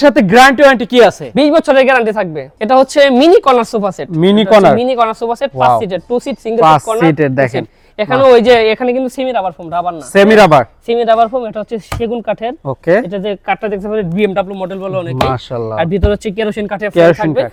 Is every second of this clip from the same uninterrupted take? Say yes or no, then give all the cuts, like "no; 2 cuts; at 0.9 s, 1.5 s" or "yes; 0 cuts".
yes; 0 cuts